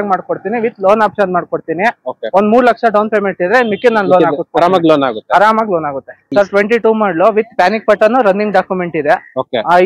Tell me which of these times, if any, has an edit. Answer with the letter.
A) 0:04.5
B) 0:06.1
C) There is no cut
B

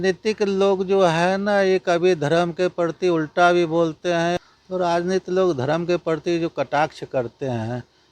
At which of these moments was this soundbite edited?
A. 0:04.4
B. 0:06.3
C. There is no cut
A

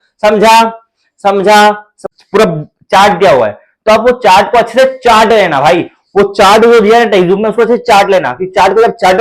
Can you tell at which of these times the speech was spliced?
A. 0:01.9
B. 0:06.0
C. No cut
A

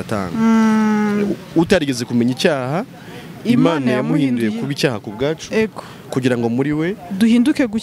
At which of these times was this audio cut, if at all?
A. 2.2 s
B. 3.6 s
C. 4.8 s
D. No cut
D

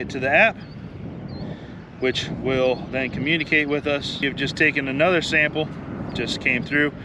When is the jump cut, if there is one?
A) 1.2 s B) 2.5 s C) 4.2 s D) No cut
C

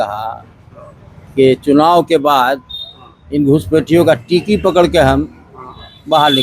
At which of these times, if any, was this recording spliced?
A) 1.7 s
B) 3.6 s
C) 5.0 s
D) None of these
D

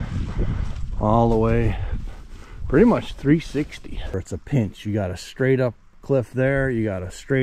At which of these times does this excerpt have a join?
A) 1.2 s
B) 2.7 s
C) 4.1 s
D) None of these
C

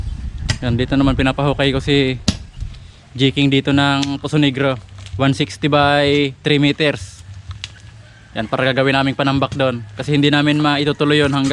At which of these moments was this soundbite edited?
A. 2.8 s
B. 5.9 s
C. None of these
C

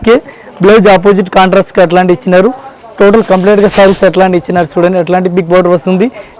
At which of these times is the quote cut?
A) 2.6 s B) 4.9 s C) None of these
C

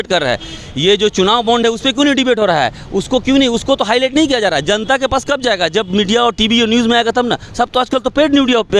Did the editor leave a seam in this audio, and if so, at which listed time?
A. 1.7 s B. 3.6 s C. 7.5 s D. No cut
D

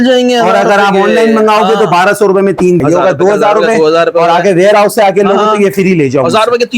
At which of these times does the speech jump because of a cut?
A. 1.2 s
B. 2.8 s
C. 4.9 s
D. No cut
B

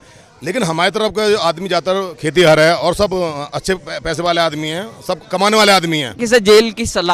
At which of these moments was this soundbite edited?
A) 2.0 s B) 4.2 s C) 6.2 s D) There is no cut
C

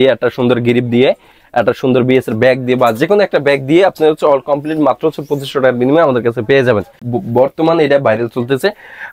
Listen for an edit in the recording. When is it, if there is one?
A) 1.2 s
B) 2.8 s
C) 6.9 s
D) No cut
C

